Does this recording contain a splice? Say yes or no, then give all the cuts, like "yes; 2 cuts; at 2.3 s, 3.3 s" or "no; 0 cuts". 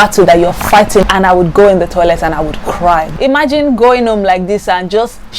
yes; 2 cuts; at 1.0 s, 3.1 s